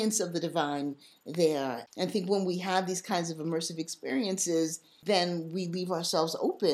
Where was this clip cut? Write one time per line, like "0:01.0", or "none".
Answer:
0:01.8
0:04.9